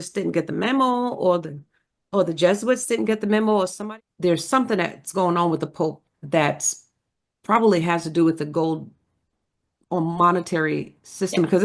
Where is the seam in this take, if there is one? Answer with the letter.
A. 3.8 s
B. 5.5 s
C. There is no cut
A